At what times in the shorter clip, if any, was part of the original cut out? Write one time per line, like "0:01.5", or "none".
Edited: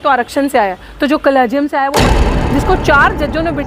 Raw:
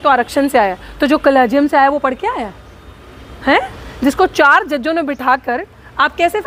0:02.3